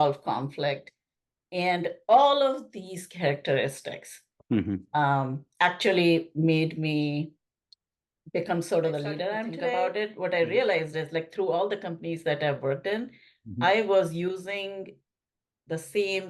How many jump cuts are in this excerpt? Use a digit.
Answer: 1